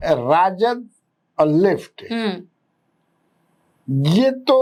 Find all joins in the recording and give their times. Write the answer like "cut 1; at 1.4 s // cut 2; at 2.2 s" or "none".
none